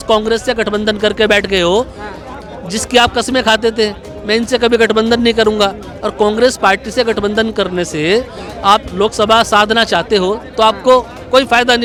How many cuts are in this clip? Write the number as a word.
zero